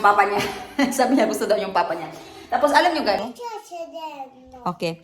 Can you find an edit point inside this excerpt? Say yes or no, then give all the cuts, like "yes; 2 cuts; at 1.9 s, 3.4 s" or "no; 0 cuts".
yes; 1 cut; at 3.2 s